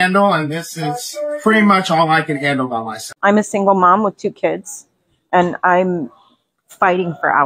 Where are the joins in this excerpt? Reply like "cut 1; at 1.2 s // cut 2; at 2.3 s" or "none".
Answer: cut 1; at 3.0 s